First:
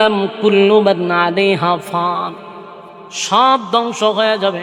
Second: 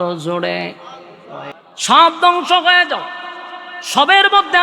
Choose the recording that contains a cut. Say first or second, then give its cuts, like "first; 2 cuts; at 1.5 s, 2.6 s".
second; 1 cut; at 1.5 s